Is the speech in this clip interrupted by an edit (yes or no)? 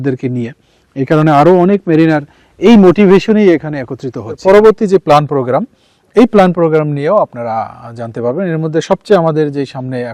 yes